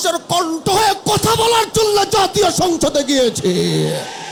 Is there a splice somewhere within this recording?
no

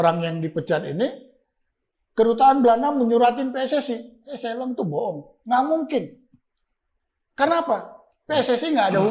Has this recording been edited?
no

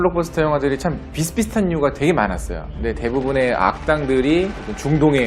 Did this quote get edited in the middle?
no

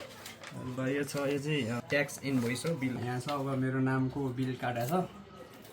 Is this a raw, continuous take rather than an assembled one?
no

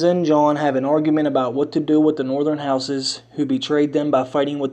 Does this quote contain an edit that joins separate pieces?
yes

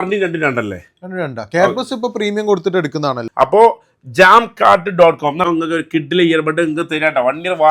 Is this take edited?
yes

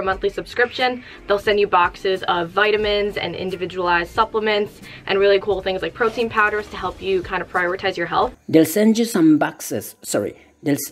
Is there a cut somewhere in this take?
no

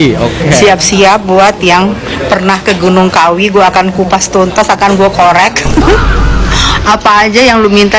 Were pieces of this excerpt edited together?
no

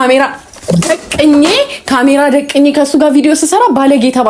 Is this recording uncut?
yes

